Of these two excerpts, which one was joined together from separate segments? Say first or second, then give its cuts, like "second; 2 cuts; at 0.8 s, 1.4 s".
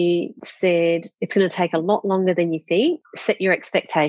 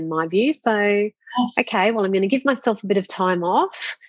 first; 1 cut; at 3.1 s